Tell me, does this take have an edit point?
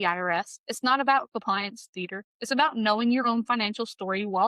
no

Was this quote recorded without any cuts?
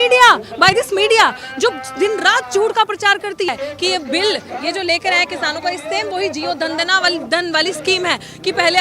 no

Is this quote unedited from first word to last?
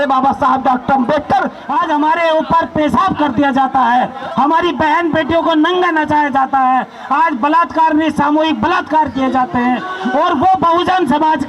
no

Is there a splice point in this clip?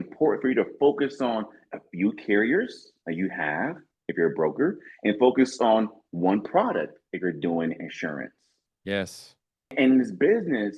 yes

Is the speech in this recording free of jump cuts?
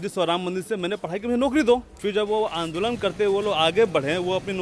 no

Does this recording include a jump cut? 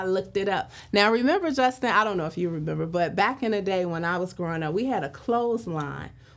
no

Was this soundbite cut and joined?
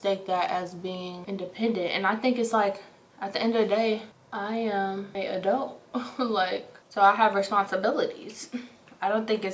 yes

